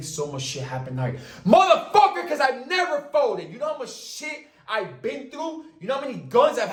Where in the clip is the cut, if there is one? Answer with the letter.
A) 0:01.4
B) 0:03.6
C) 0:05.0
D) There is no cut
D